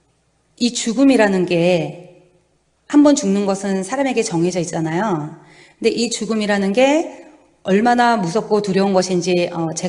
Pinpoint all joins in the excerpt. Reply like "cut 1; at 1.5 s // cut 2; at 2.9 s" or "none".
cut 1; at 1.5 s